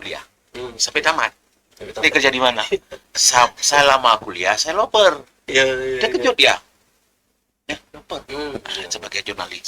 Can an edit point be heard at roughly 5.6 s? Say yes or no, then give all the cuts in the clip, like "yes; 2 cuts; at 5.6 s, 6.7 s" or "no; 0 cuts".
no; 2 cuts; at 2.0 s, 8.2 s